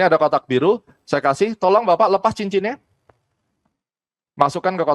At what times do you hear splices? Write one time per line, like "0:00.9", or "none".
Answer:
none